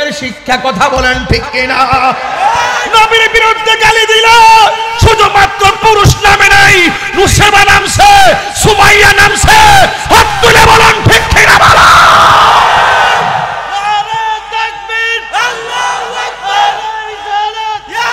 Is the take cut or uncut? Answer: uncut